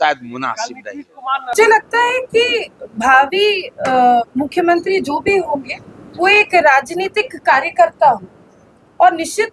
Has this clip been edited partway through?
yes; 1 cut; at 1.5 s

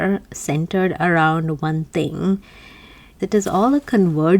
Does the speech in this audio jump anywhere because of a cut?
yes; 1 cut; at 3.0 s

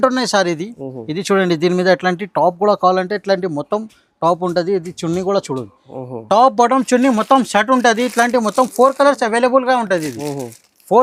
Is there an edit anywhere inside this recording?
no; 0 cuts

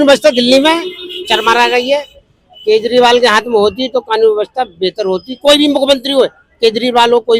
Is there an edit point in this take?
no; 0 cuts

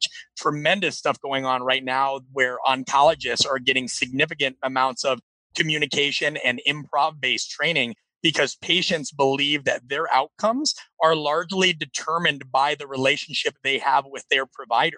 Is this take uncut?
yes; 0 cuts

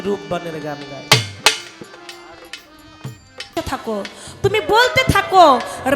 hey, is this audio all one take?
no; 1 cut; at 3.5 s

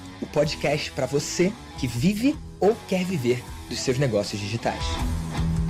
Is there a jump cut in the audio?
no; 0 cuts

